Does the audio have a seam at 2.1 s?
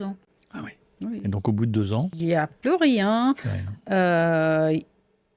yes; 1 cut; at 2.1 s

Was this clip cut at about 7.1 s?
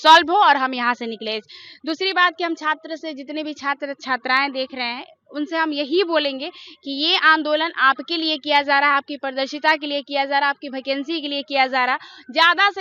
no; 0 cuts

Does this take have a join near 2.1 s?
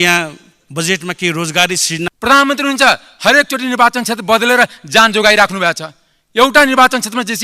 yes; 1 cut; at 2.1 s

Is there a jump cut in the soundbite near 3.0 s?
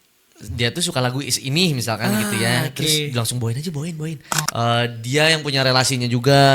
no; 1 cut; at 4.4 s

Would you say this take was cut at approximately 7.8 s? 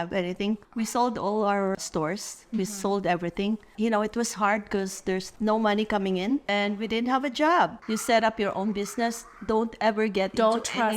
yes; 4 cuts; at 1.8 s, 3.7 s, 6.4 s, 7.8 s

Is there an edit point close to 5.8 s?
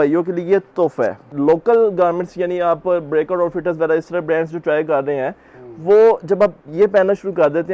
no; 1 cut; at 1.2 s

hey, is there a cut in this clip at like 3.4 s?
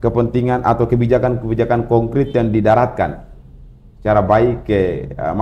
no; 0 cuts

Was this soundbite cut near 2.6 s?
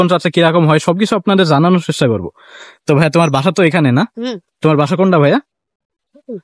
no; 0 cuts

